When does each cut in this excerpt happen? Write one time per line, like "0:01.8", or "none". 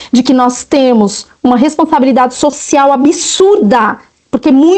none